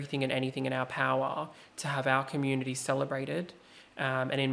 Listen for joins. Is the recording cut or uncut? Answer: uncut